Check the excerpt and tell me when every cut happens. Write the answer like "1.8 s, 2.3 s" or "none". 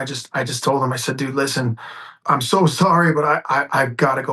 2.2 s